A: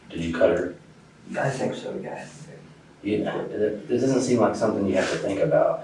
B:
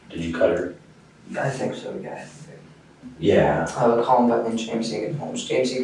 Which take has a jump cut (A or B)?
B